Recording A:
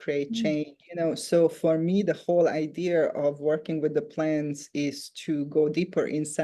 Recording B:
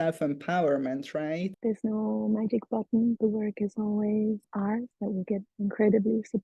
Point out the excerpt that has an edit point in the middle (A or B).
B